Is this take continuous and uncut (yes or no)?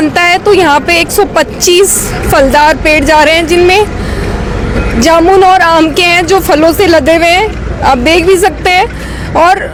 yes